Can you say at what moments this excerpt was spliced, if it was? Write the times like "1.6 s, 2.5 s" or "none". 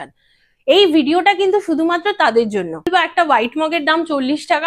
2.9 s